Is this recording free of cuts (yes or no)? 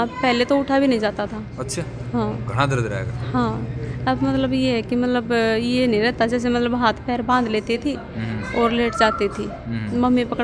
yes